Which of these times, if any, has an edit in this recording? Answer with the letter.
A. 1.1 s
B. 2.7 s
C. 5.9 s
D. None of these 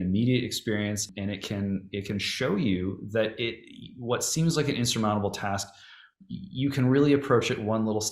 A